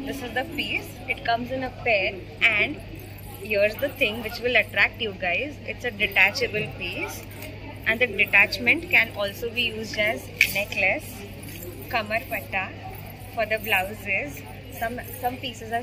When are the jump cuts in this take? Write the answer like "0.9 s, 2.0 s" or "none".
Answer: none